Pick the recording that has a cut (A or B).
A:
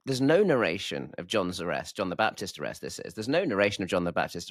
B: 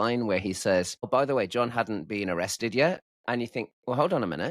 B